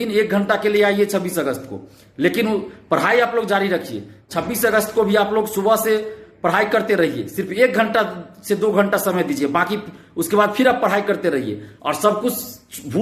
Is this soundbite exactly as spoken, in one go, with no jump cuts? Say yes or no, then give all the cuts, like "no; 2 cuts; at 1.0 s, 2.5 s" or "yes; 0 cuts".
yes; 0 cuts